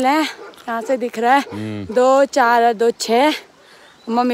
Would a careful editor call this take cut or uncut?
uncut